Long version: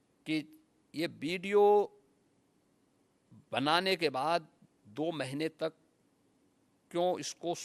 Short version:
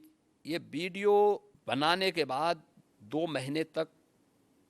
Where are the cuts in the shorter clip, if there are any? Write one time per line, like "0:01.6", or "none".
0:01.5